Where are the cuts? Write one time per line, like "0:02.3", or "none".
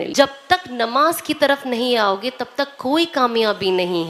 none